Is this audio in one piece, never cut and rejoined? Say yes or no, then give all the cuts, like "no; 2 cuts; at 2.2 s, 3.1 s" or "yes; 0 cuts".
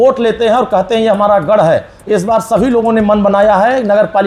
yes; 0 cuts